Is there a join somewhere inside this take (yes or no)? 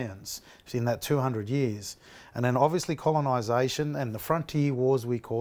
no